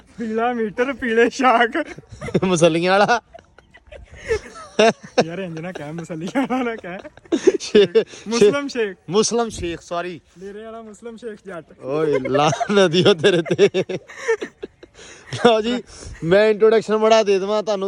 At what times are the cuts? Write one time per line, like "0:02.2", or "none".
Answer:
none

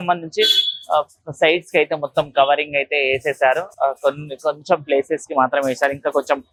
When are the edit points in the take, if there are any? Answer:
none

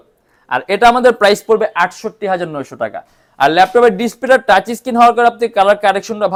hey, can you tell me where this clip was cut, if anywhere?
none

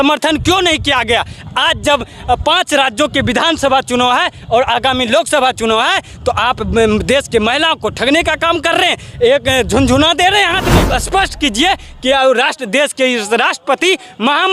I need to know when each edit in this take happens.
0:10.8

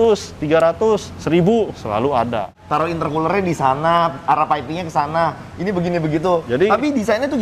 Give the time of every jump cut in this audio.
0:02.6
0:06.4

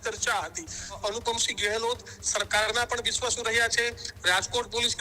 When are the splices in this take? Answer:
0:01.0

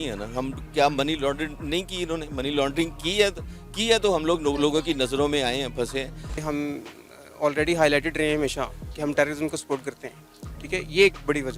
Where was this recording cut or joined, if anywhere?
none

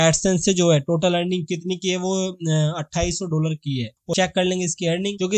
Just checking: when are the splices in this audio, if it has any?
0:04.0

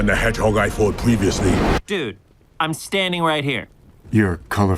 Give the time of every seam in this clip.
0:03.8

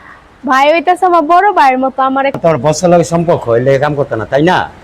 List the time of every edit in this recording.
0:02.4

